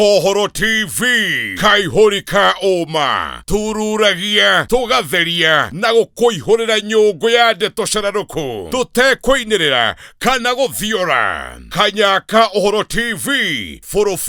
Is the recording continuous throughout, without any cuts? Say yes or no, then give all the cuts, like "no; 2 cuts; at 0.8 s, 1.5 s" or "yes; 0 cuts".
yes; 0 cuts